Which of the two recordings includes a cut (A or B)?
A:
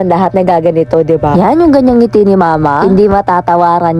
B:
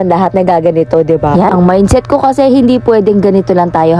B